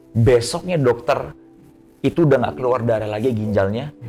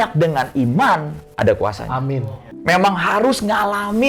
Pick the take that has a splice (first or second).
second